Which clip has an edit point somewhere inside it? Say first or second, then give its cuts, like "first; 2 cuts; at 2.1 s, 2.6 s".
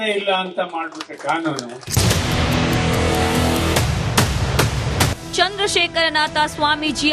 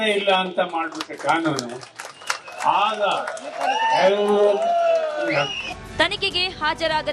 second; 1 cut; at 1.7 s